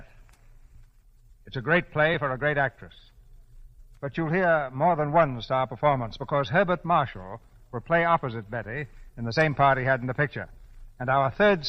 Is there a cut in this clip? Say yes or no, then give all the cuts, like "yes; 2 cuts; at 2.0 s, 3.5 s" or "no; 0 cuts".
no; 0 cuts